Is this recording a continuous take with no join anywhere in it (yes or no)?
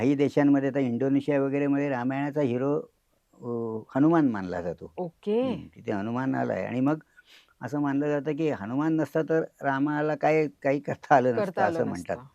yes